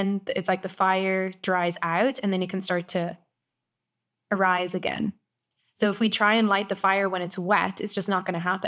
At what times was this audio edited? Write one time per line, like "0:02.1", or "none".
none